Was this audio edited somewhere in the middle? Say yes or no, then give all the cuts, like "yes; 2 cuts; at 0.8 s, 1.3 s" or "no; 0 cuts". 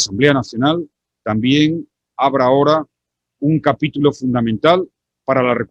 no; 0 cuts